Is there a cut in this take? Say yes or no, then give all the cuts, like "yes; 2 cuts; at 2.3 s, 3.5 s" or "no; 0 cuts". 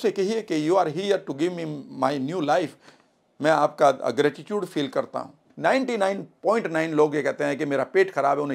yes; 1 cut; at 5.4 s